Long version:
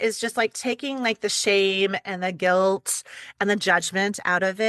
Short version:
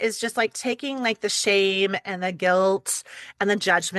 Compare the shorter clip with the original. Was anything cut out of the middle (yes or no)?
no